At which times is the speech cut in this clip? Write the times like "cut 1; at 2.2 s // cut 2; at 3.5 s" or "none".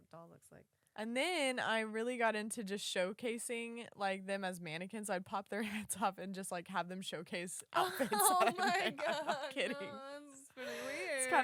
none

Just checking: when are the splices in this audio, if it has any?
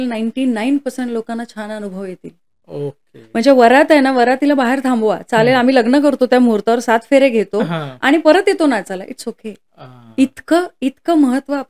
none

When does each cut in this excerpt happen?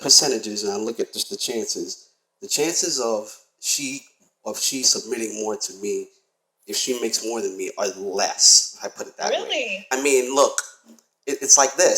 cut 1; at 9.9 s

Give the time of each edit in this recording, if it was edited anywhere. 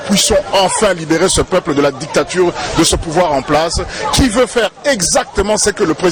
none

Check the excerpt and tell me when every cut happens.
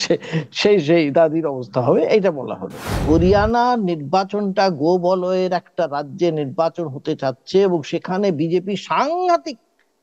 cut 1; at 3.0 s

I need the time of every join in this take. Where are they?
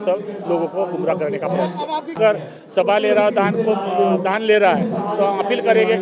cut 1; at 2.1 s

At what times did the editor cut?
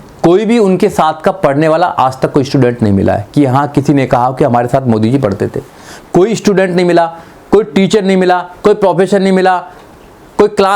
none

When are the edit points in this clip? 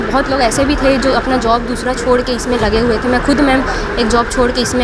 none

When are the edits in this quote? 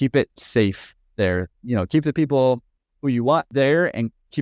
cut 1; at 3.5 s

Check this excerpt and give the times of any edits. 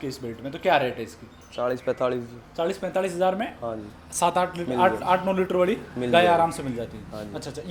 none

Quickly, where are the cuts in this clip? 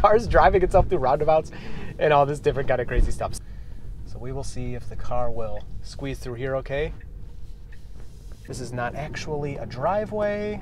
cut 1; at 3.3 s // cut 2; at 8.4 s

